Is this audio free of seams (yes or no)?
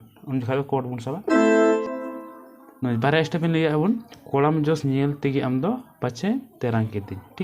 no